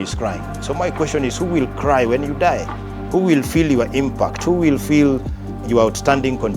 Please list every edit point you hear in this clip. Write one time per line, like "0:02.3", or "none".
0:05.6